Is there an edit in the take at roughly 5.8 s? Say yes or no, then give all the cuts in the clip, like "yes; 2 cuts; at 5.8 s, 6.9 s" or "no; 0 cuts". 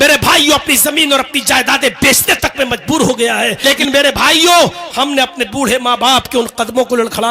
no; 1 cut; at 3.6 s